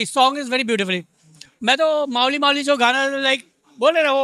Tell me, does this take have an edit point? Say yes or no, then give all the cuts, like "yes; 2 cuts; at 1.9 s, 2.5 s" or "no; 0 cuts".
no; 0 cuts